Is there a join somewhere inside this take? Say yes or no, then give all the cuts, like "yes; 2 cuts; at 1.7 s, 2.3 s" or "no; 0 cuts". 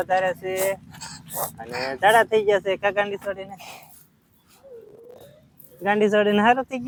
no; 0 cuts